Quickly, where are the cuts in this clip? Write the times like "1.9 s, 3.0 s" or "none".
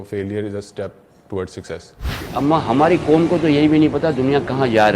2.3 s